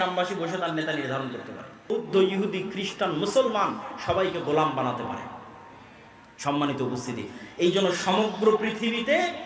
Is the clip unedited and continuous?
no; 1 cut; at 1.8 s

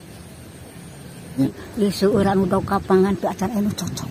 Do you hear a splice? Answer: yes; 1 cut; at 1.4 s

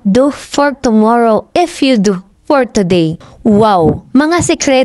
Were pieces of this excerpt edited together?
no; 0 cuts

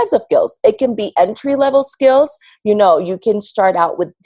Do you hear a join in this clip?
no; 0 cuts

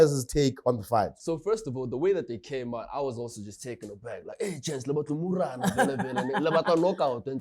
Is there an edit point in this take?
yes; 1 cut; at 1.2 s

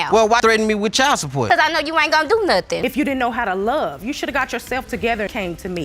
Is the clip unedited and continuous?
no; 1 cut; at 2.8 s

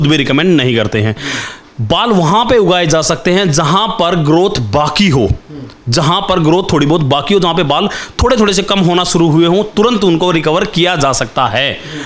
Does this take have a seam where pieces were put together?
no; 0 cuts

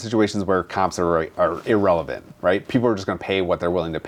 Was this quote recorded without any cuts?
yes; 0 cuts

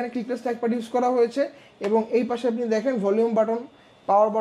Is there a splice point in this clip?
no; 0 cuts

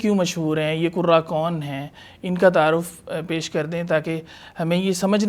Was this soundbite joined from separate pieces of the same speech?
no; 0 cuts

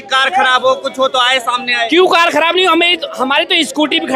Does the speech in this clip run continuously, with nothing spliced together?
yes; 0 cuts

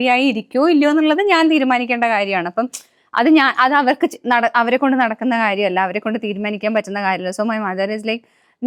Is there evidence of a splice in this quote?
no; 0 cuts

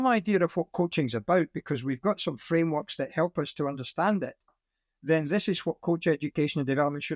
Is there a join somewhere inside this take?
no; 0 cuts

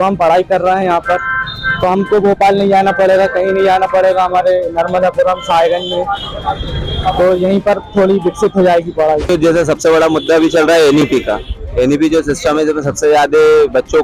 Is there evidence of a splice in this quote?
yes; 1 cut; at 9.3 s

